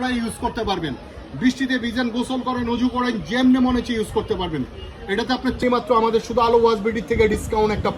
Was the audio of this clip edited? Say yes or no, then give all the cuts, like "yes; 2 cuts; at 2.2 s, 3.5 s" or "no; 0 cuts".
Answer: yes; 1 cut; at 5.6 s